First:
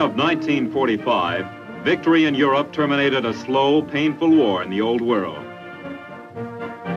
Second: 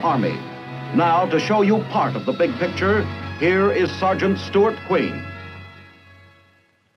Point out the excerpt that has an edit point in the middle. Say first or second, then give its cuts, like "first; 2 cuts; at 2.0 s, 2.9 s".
second; 1 cut; at 4.1 s